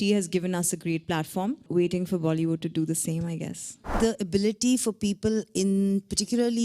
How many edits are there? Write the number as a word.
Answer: two